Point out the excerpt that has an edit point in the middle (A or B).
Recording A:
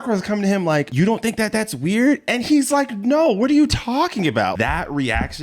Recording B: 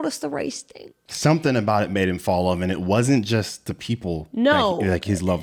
A